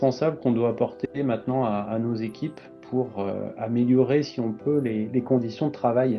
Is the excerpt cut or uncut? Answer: uncut